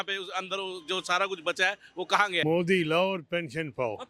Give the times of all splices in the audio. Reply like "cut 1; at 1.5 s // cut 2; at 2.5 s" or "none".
cut 1; at 2.4 s